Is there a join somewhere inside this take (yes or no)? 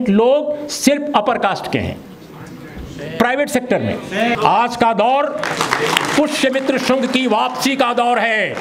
yes